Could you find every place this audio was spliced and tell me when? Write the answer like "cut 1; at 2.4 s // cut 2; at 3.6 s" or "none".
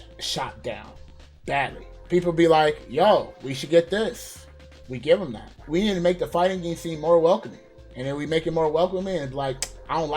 cut 1; at 5.5 s

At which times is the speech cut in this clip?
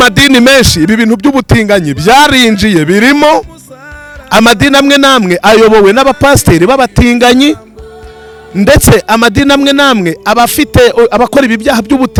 none

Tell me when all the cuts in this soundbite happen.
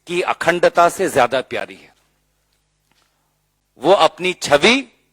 none

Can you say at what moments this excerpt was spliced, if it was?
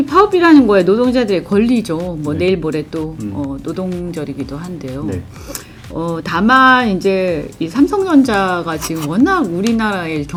none

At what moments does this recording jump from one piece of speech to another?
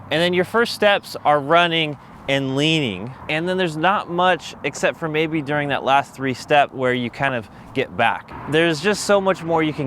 cut 1; at 3.1 s // cut 2; at 8.3 s

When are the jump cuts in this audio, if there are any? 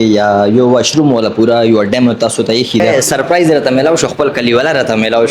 cut 1; at 2.9 s

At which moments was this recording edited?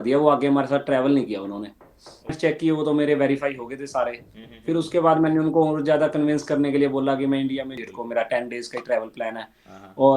cut 1; at 2.4 s // cut 2; at 7.8 s

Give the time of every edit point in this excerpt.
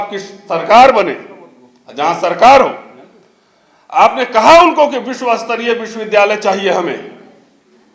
none

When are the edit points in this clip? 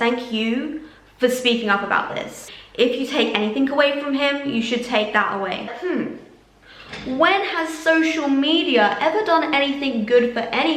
cut 1; at 2.4 s // cut 2; at 5.7 s

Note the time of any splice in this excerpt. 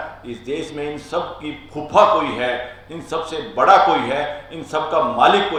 none

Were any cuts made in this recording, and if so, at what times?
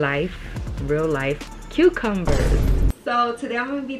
cut 1; at 2.9 s

